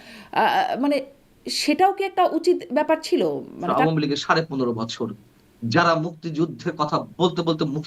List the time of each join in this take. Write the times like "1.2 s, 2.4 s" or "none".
3.7 s